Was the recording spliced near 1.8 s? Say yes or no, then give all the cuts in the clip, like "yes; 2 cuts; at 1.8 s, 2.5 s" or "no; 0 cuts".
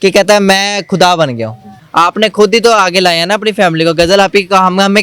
yes; 1 cut; at 1.8 s